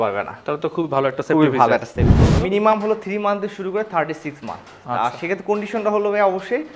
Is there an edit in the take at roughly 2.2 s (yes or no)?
yes